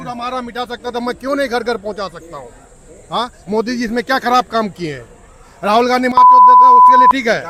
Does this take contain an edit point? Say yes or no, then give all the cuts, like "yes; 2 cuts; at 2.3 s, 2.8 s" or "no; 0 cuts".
no; 0 cuts